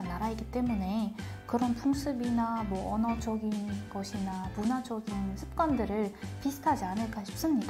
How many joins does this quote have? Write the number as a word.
zero